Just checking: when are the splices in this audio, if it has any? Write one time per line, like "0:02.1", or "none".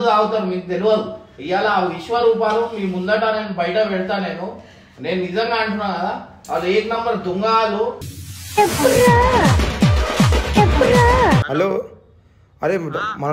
0:11.5